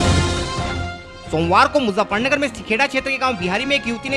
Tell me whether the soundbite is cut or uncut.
uncut